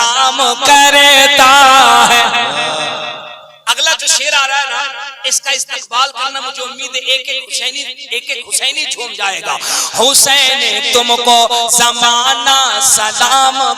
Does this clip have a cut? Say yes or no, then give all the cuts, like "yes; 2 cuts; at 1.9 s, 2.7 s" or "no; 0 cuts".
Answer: no; 0 cuts